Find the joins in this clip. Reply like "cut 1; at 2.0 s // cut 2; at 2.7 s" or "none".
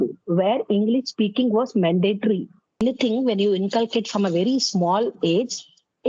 cut 1; at 2.8 s